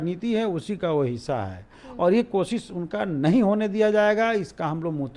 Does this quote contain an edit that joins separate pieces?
no; 0 cuts

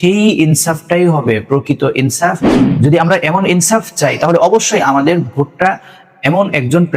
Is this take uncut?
no; 1 cut; at 2.5 s

